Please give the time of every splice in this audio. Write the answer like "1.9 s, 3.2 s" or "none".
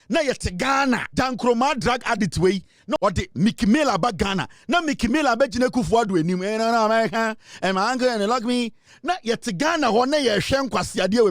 1.1 s, 3.0 s